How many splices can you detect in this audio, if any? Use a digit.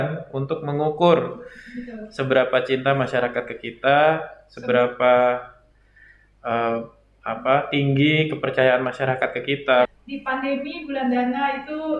1